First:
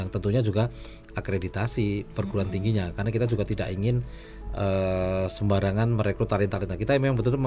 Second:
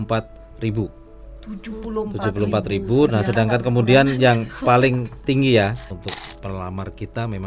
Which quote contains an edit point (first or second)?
second